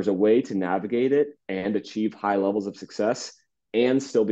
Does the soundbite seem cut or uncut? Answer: uncut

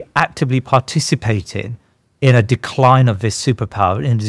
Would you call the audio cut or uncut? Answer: uncut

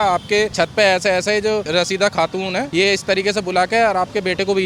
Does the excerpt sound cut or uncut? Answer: uncut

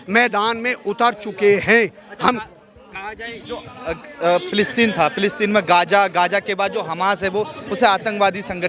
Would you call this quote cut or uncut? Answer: uncut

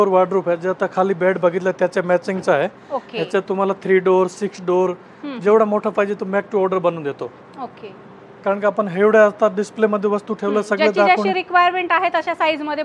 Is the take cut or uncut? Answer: uncut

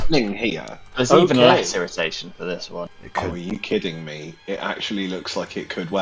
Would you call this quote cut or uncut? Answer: cut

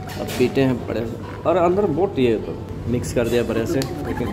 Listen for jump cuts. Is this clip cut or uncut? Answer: cut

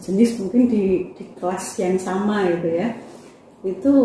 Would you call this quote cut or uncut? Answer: uncut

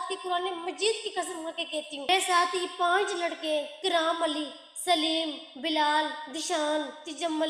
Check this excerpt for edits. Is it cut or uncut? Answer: uncut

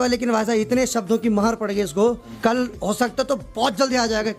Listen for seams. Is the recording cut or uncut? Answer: uncut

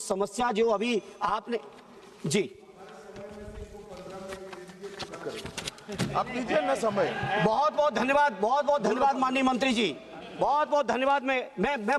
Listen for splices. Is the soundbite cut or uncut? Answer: uncut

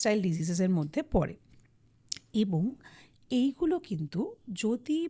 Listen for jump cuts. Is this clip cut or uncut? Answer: uncut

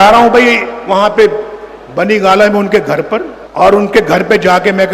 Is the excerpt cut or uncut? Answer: cut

